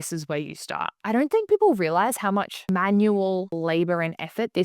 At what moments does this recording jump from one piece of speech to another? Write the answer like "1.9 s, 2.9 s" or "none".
1.0 s, 2.6 s, 3.5 s